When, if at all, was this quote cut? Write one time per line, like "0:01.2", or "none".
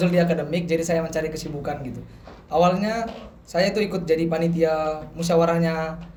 none